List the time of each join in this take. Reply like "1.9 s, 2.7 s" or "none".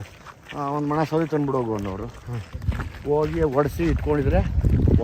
none